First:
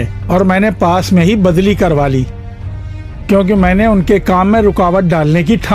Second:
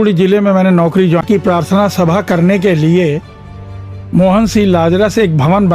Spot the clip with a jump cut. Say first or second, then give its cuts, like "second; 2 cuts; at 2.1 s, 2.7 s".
second; 1 cut; at 1.2 s